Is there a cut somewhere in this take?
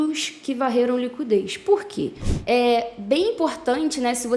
yes; 1 cut; at 2.3 s

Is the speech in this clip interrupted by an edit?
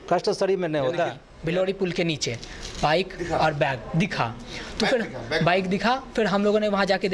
yes; 1 cut; at 1.3 s

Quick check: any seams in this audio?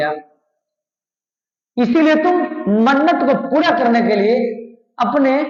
no; 0 cuts

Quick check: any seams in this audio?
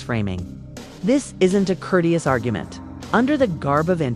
no; 0 cuts

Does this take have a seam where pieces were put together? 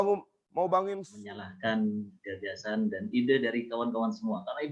yes; 1 cut; at 1.1 s

